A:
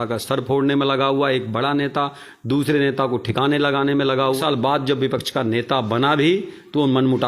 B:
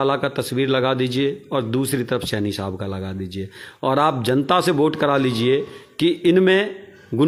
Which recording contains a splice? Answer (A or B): A